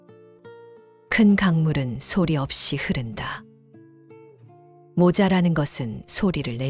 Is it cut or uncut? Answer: uncut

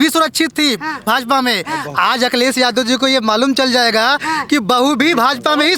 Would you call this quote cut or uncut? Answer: uncut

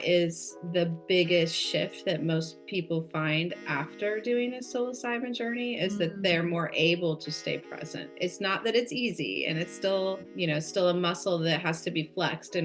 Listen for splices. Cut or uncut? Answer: uncut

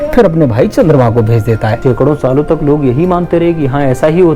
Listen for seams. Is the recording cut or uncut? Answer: cut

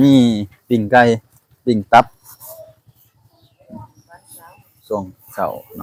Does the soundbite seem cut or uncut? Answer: uncut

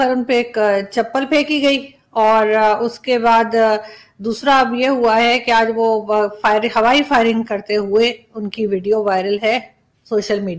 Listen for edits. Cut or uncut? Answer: uncut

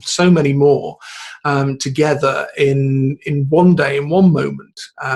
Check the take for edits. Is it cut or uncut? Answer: uncut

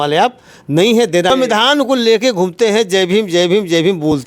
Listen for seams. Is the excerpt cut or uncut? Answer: cut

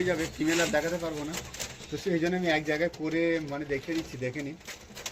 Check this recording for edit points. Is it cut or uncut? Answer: uncut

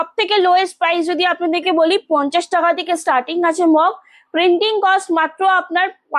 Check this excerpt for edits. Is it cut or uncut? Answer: uncut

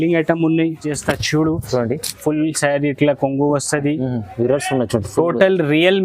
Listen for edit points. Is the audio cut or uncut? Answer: cut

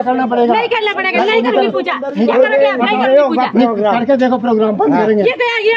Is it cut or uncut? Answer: uncut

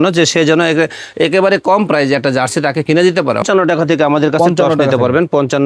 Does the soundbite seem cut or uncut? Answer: cut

